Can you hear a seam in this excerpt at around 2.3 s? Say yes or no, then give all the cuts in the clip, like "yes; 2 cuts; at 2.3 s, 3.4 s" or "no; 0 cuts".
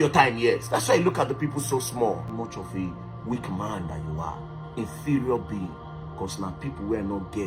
yes; 1 cut; at 2.3 s